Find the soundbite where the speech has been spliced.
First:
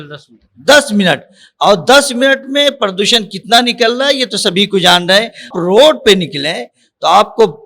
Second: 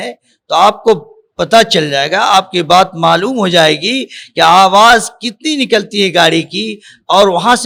first; 1 cut; at 5.5 s

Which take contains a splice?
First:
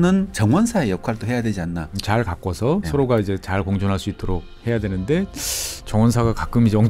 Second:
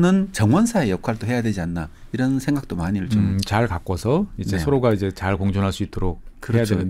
first; 3 cuts; at 2.0 s, 2.9 s, 4.5 s

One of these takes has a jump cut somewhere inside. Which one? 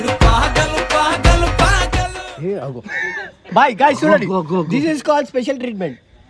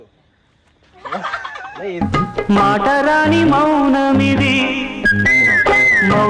first; 1 cut; at 2.2 s

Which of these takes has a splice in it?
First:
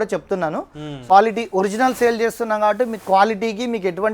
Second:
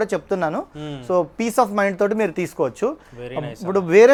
first; 1 cut; at 1.0 s

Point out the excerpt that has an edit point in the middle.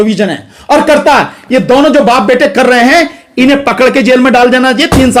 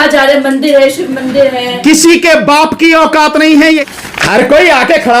second; 1 cut; at 3.8 s

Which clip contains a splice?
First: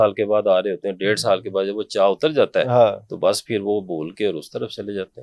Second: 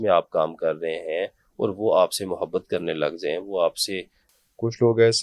second; 1 cut; at 4.2 s

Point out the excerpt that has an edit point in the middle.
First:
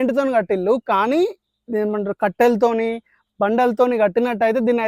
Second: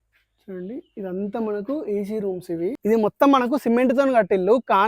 second; 1 cut; at 2.8 s

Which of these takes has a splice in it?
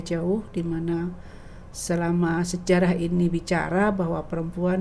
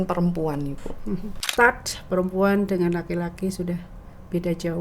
second; 1 cut; at 1.5 s

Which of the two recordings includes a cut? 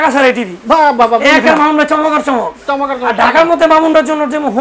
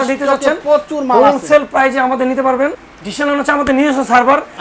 second; 1 cut; at 2.8 s

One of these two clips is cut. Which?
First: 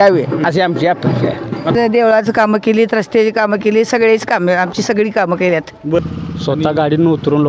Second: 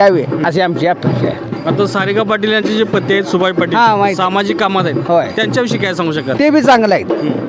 first; 2 cuts; at 1.7 s, 6.0 s

